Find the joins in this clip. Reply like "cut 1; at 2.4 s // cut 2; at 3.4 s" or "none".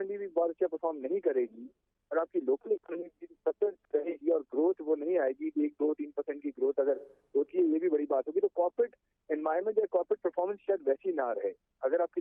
none